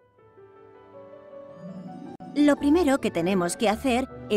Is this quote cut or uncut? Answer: cut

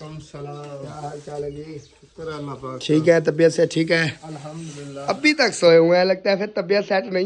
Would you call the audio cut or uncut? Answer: uncut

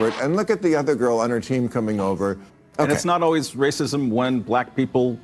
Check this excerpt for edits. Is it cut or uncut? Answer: cut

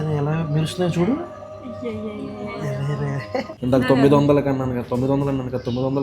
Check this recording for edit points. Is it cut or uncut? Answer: cut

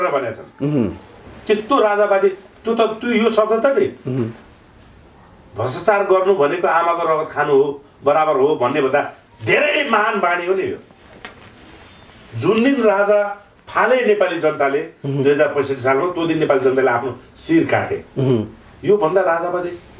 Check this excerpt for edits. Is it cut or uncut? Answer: uncut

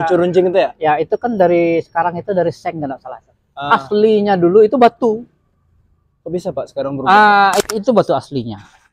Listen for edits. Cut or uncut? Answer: cut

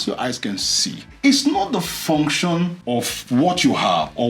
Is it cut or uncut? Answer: cut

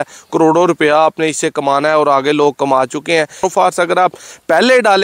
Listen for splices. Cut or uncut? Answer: cut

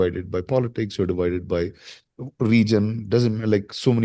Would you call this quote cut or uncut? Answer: uncut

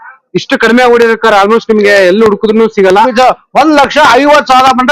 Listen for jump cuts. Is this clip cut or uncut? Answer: cut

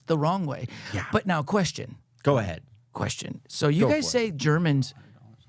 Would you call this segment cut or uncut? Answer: uncut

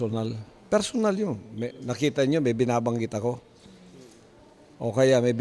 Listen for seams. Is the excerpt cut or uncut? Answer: uncut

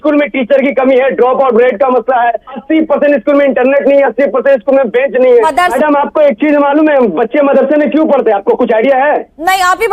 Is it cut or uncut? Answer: cut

